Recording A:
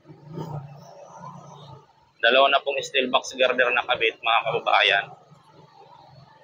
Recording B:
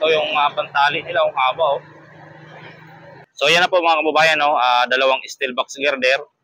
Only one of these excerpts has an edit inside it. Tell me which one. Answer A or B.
B